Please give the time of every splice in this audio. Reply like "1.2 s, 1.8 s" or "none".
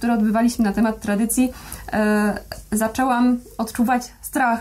none